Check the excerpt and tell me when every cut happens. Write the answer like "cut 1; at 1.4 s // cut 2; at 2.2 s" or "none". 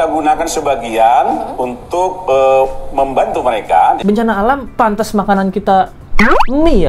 cut 1; at 4.0 s